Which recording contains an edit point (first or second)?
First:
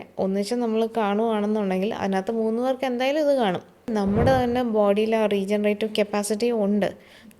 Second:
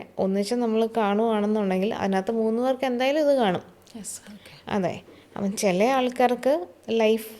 first